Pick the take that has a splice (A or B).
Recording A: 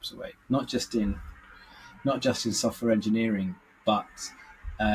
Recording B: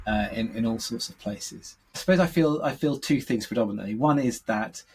B